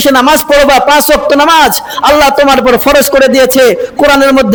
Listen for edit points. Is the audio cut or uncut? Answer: uncut